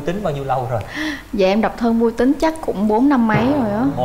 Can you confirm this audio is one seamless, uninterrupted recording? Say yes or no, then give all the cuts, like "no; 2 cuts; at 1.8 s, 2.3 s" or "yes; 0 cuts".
yes; 0 cuts